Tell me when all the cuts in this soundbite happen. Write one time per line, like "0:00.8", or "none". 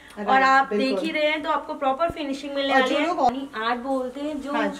0:03.3